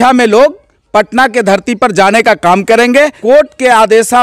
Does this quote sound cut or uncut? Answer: cut